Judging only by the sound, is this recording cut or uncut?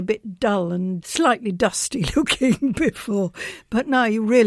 cut